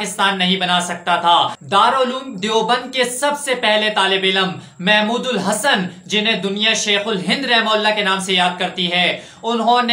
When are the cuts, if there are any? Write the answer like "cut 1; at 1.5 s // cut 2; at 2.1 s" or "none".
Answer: cut 1; at 1.6 s